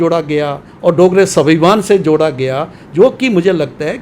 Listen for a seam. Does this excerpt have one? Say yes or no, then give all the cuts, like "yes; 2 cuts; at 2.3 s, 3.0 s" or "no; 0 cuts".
no; 0 cuts